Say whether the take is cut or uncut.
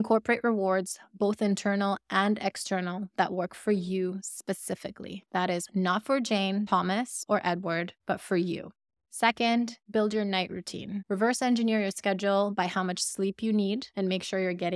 uncut